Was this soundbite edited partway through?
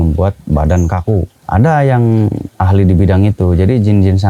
yes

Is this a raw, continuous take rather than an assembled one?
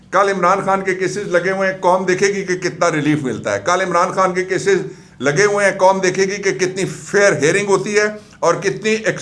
yes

